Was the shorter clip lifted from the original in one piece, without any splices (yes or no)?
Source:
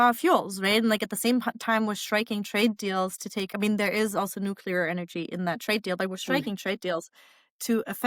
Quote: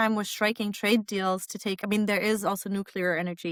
yes